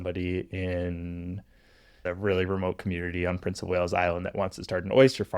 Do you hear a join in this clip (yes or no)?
yes